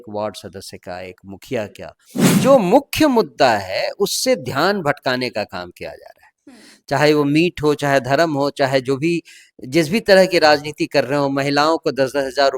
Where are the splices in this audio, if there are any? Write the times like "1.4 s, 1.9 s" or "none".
2.4 s